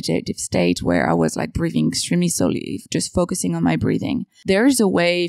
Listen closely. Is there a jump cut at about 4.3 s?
yes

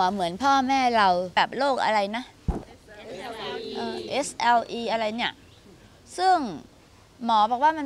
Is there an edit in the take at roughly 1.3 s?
yes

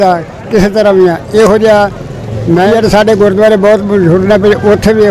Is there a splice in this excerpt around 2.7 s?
yes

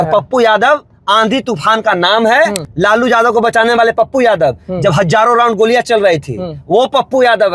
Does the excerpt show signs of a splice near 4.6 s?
no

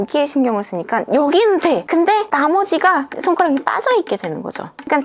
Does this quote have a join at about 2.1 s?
yes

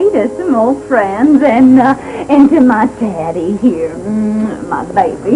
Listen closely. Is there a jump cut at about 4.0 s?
yes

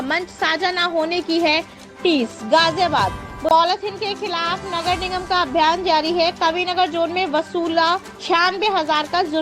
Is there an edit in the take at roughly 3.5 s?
yes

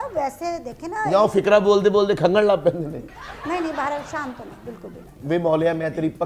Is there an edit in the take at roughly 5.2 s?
yes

